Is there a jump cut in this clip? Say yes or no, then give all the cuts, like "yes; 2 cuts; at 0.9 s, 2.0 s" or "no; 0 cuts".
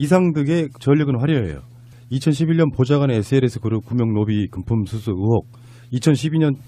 yes; 1 cut; at 5.5 s